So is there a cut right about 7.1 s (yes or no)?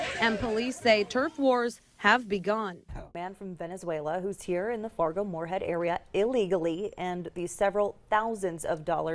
no